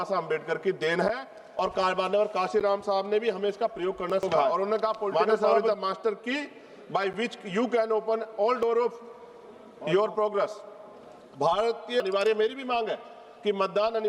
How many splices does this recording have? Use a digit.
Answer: 2